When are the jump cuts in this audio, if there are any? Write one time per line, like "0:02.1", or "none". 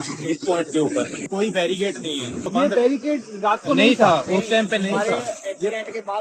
0:01.2
0:02.4